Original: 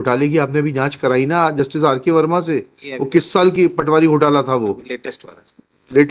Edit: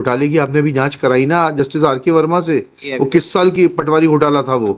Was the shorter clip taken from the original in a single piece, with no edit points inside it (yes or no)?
yes